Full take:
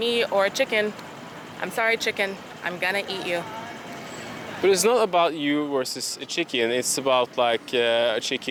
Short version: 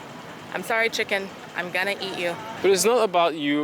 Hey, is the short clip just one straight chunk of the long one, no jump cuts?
no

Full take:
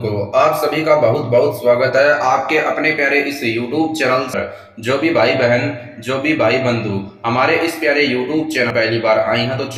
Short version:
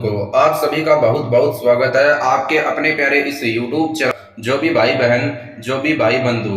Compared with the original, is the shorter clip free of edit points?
no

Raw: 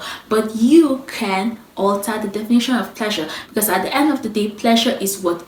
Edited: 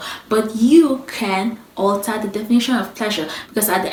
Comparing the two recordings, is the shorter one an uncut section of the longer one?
yes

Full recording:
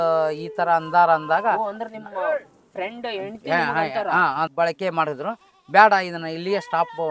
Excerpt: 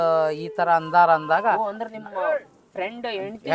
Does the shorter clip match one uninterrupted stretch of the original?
yes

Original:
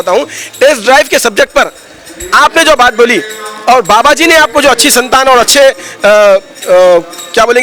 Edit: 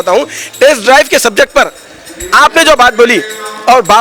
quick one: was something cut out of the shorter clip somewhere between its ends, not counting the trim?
no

